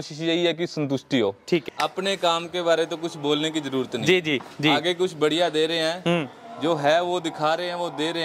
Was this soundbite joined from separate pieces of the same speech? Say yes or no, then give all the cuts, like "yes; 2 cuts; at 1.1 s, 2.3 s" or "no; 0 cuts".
yes; 1 cut; at 1.6 s